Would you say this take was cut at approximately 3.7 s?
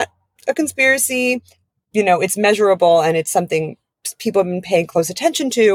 no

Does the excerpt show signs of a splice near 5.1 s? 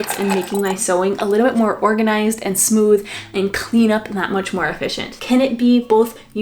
yes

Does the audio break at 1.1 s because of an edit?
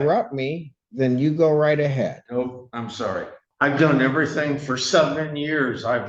no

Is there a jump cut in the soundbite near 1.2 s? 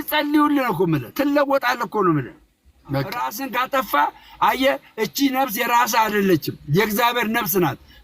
no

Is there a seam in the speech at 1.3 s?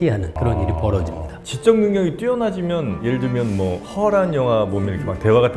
yes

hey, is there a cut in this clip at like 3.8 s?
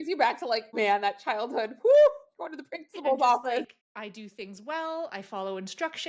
yes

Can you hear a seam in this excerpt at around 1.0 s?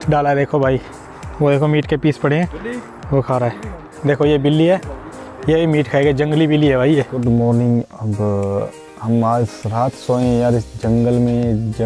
no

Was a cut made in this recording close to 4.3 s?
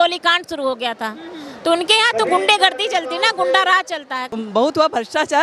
yes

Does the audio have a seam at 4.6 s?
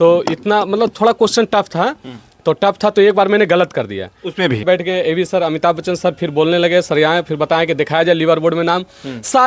yes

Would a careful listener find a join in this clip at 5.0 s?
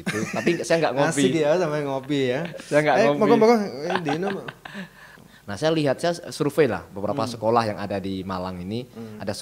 yes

